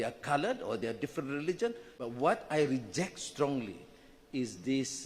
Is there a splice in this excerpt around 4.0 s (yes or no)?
no